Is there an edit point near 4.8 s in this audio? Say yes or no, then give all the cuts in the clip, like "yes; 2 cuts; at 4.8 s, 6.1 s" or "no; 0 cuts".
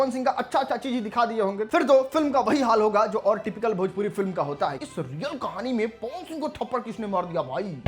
yes; 1 cut; at 4.8 s